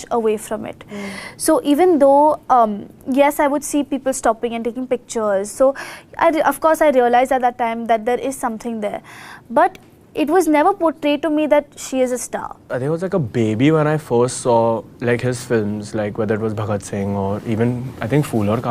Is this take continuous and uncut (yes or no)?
no